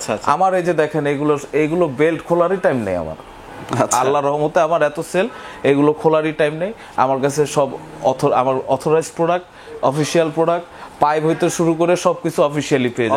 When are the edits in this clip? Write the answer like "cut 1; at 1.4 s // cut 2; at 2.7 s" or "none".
none